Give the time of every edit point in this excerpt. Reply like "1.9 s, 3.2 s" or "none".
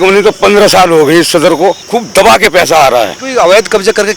1.8 s, 3.2 s